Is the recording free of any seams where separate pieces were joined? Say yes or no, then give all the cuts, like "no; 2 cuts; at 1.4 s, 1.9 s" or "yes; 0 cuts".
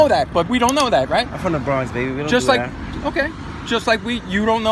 yes; 0 cuts